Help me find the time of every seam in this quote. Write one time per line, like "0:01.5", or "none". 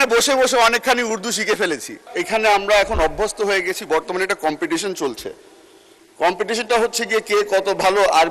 0:02.1